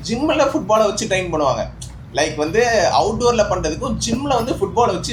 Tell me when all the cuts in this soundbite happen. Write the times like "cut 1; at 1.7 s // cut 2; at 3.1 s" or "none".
none